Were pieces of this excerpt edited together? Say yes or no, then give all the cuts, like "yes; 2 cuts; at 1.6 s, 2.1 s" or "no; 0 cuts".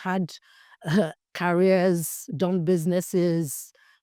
no; 0 cuts